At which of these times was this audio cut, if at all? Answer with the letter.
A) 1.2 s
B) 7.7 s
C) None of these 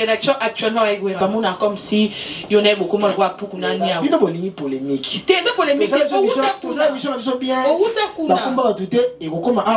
A